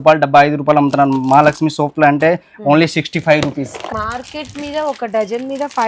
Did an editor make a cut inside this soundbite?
yes; 1 cut; at 3.8 s

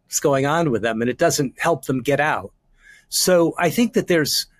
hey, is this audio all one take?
yes; 0 cuts

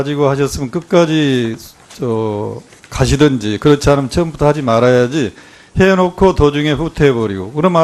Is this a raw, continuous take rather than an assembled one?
no; 1 cut; at 4.8 s

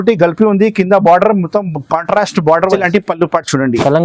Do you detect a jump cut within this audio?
yes; 1 cut; at 2.7 s

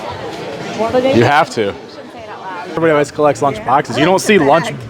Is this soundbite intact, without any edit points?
no; 1 cut; at 2.3 s

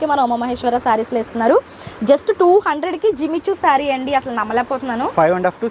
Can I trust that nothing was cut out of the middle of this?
yes; 0 cuts

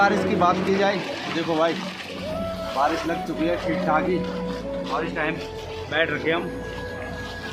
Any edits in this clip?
no; 0 cuts

